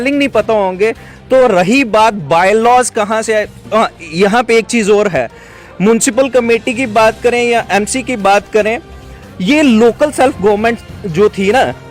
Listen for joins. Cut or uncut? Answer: uncut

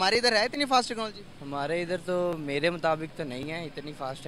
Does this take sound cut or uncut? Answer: uncut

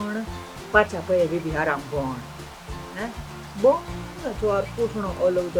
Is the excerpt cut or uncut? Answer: uncut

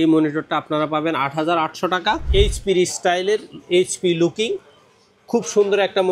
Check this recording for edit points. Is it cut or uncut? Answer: cut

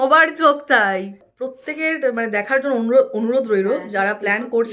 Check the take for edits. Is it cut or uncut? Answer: cut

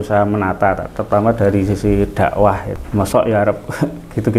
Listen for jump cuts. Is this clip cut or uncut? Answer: cut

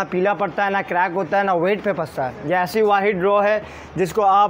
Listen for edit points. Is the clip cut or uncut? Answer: uncut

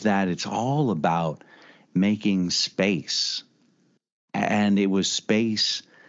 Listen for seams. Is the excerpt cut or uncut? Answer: uncut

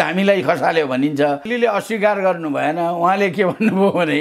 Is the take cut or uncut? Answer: cut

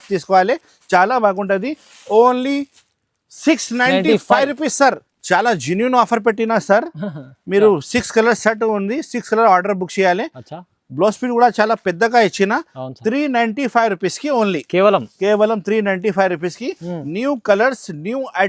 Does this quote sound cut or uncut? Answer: cut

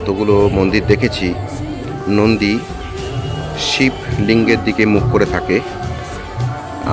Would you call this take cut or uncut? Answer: uncut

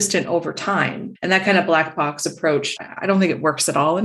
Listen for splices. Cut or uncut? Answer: cut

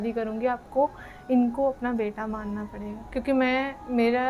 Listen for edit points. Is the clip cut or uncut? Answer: uncut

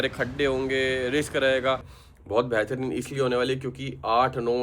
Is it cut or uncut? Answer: cut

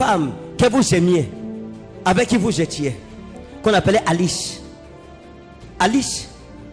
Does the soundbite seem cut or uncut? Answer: uncut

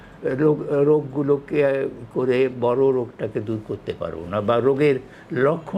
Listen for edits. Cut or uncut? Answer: uncut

